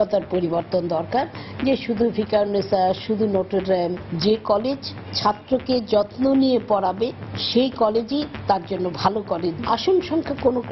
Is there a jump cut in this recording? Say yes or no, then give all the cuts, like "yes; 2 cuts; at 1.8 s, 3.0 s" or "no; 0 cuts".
no; 0 cuts